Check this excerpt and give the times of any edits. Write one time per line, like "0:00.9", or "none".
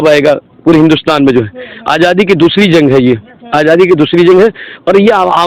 none